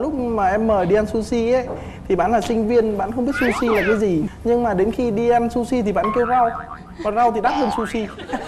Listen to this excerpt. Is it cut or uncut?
uncut